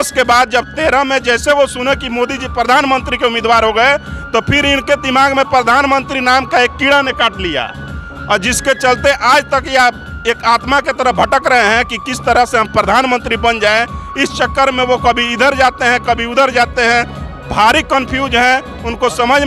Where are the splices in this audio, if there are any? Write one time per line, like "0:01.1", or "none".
0:02.2